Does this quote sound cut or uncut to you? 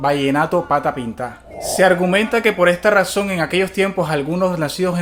uncut